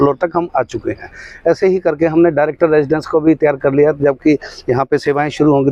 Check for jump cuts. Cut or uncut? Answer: uncut